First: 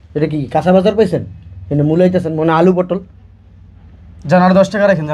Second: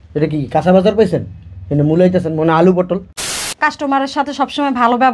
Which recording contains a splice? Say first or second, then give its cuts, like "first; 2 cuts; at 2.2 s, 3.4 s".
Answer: second; 1 cut; at 3.4 s